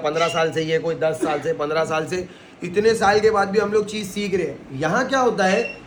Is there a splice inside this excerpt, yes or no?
no